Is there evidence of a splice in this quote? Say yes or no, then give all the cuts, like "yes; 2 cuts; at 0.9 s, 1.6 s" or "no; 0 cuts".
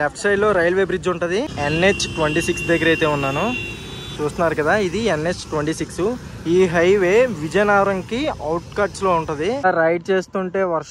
yes; 2 cuts; at 1.5 s, 9.6 s